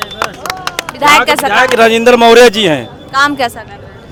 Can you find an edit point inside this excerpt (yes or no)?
no